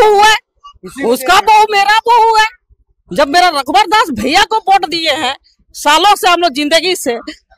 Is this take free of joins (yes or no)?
yes